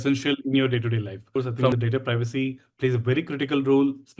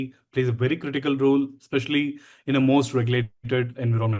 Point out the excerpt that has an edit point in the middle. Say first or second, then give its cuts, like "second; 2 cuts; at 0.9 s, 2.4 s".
first; 1 cut; at 1.5 s